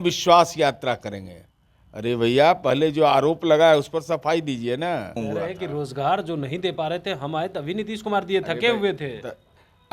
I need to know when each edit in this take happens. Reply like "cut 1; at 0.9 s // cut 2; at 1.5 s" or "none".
cut 1; at 5.2 s